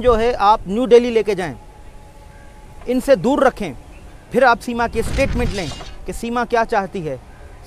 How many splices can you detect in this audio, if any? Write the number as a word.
zero